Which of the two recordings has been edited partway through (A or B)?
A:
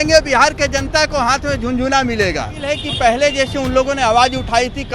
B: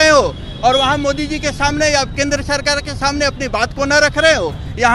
A